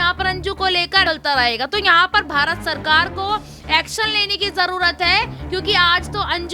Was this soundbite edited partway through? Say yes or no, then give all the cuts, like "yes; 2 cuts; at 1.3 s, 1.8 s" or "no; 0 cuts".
yes; 1 cut; at 1.0 s